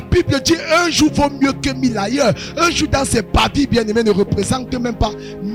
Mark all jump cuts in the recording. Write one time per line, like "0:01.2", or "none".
none